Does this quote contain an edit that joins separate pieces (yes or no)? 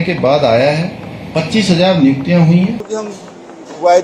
yes